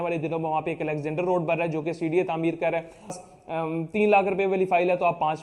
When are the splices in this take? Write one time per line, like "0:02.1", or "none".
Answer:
0:03.2